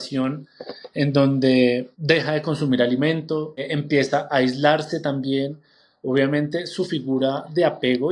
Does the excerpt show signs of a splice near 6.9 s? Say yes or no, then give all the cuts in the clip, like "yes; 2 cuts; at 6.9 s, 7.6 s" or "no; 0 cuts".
no; 2 cuts; at 1.9 s, 3.7 s